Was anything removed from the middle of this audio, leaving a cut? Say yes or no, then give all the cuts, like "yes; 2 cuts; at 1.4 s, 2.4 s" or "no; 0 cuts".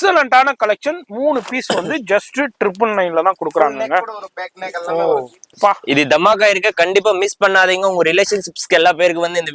no; 0 cuts